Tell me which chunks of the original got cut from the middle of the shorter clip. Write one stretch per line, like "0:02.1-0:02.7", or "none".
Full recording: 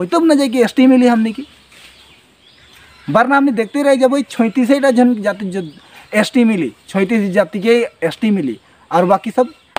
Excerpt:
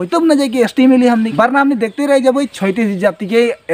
0:01.3-0:03.1
0:04.3-0:06.8